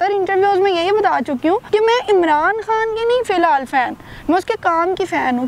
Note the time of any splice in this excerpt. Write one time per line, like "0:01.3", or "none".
0:01.6